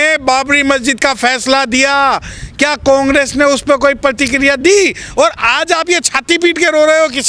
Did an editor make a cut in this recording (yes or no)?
no